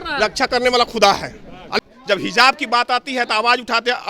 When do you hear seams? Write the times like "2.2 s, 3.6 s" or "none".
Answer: 1.8 s